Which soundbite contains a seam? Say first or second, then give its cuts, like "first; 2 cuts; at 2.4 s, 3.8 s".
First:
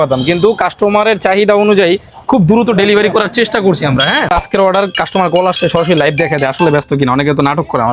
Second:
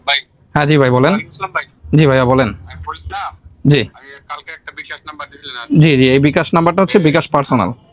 first; 1 cut; at 4.3 s